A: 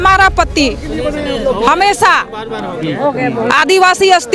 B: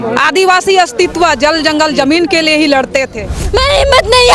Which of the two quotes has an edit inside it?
B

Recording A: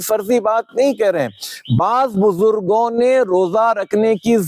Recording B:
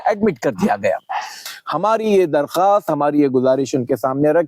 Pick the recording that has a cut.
B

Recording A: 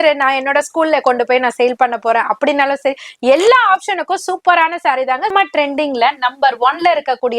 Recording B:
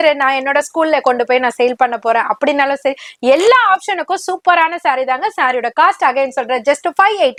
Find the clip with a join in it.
A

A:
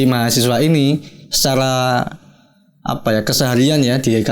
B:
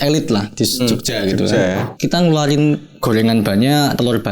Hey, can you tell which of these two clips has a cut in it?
B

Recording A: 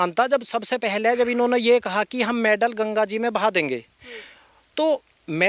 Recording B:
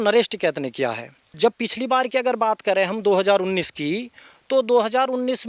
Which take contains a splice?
B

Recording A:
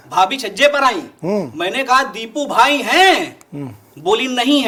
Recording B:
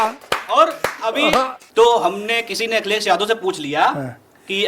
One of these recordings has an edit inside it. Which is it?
B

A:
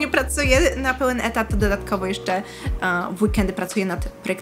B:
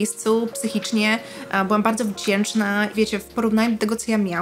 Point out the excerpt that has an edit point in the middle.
B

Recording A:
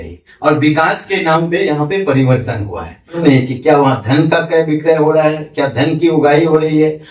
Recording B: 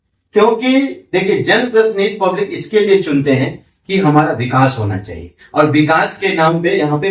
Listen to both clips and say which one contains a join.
A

